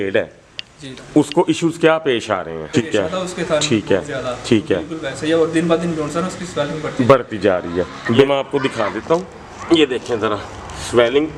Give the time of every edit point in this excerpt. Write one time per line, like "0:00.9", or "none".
0:02.7
0:08.2